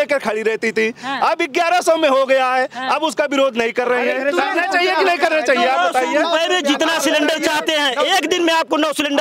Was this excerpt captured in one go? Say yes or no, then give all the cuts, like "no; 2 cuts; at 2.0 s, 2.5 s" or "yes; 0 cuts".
yes; 0 cuts